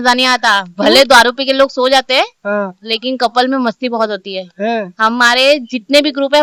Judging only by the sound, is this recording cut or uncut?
uncut